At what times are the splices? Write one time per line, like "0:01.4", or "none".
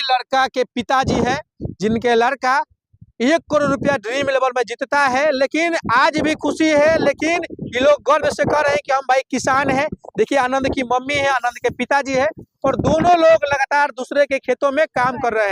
none